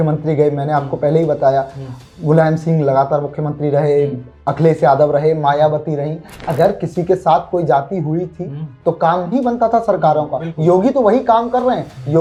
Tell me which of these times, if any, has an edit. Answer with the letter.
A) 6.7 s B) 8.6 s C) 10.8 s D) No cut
D